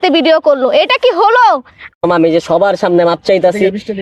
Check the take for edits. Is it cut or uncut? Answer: cut